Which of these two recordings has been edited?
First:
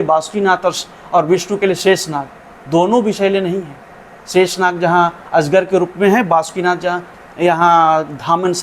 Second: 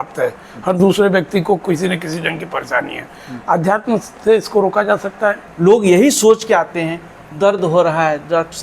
second; 1 cut; at 5.5 s

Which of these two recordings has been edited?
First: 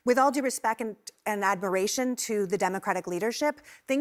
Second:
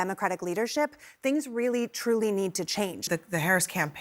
second; 1 cut; at 3.1 s

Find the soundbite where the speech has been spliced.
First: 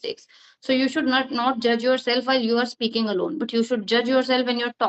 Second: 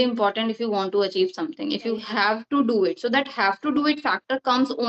second; 1 cut; at 2.0 s

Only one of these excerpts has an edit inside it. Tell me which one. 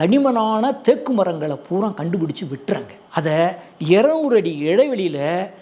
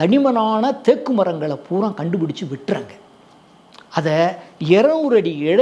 first; 1 cut; at 3.0 s

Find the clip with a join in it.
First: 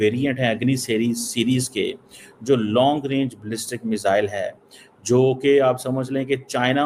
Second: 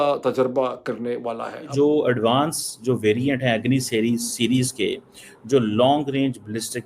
second; 1 cut; at 1.7 s

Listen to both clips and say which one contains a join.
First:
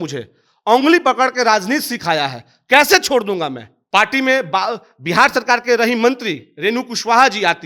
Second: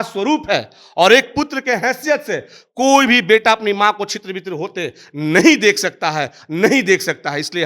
first; 1 cut; at 3.7 s

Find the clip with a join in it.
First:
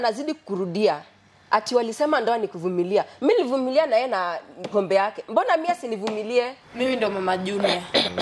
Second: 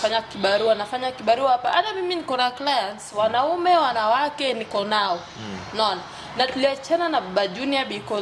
first; 1 cut; at 6.6 s

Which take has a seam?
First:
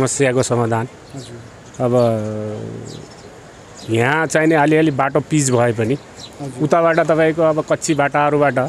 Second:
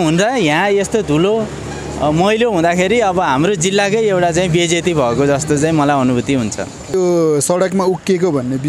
second; 1 cut; at 6.9 s

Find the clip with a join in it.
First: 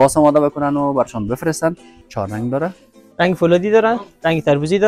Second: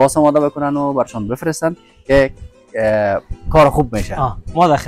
first; 1 cut; at 1.9 s

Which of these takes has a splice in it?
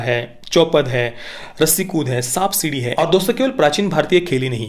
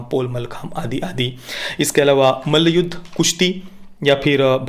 first; 1 cut; at 2.8 s

